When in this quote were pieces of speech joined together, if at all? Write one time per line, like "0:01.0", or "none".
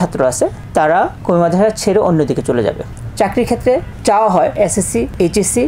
0:02.9
0:04.7